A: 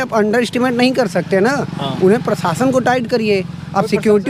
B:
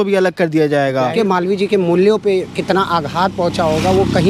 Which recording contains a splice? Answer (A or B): B